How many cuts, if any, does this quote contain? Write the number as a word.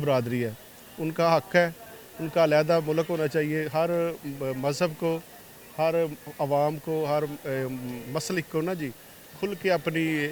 zero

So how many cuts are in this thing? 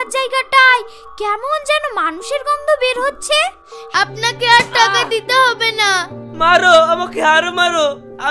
one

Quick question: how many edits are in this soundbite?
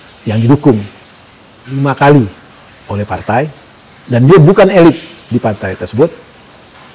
one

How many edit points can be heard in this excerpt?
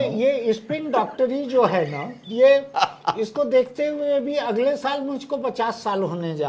zero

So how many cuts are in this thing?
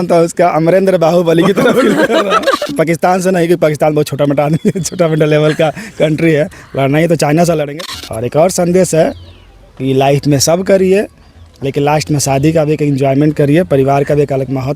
two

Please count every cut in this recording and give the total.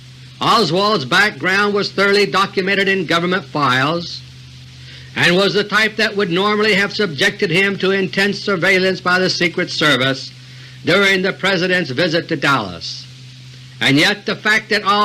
one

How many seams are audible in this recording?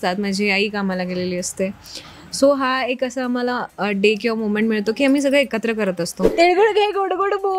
one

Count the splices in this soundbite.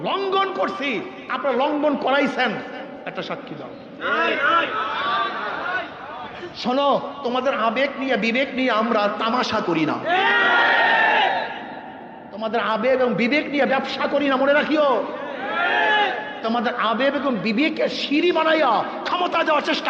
zero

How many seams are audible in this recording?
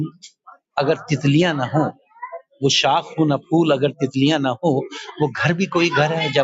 zero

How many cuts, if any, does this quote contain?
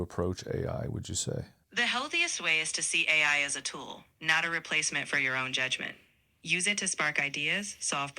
one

